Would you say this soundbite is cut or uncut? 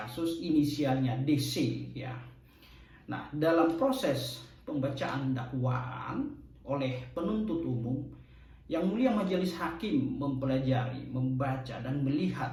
uncut